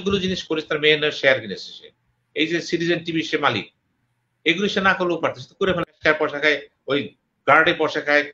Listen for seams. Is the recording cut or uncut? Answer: cut